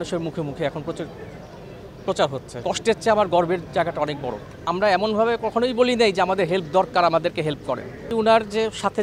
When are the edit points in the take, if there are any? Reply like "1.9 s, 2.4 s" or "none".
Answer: 2.5 s, 4.6 s, 8.1 s